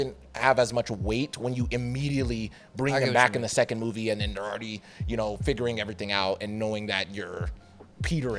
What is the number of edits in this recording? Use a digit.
0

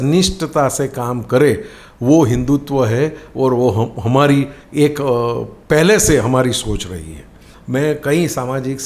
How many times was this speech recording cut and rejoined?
1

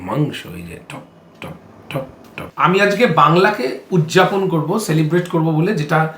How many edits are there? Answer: 1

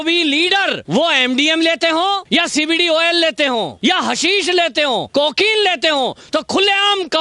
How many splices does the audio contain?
4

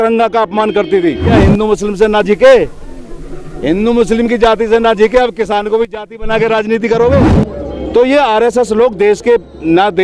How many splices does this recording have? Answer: 2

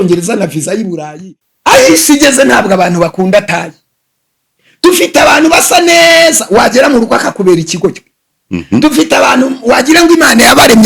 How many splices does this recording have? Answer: 1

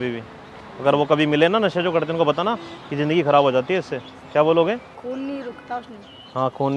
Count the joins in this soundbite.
1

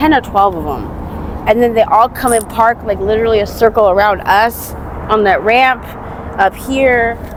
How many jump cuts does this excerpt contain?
0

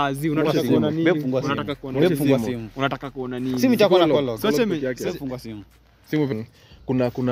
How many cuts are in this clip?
1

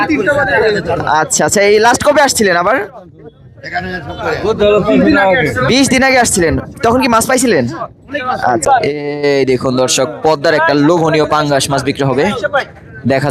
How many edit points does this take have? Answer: 1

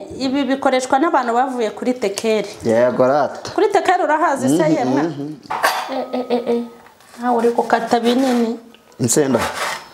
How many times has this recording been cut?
1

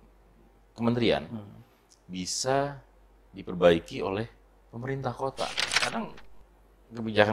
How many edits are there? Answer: 1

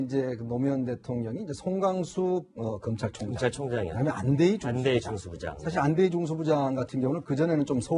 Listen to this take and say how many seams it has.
1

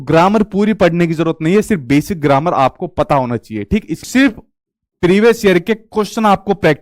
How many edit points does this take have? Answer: 1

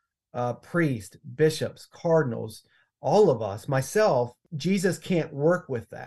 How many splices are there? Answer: 1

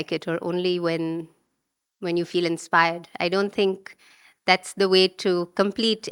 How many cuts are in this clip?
0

